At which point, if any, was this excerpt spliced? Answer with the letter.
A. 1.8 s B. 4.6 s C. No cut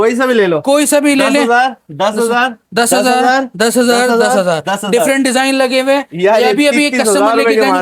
C